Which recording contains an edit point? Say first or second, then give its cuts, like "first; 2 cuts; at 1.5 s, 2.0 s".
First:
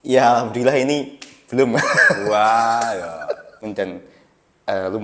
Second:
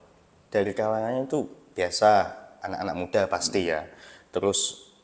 first; 1 cut; at 3.6 s